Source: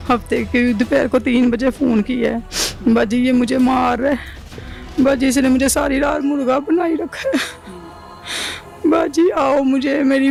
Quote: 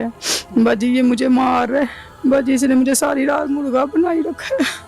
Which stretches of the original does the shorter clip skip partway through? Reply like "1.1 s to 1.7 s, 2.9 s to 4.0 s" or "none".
4.3 s to 4.8 s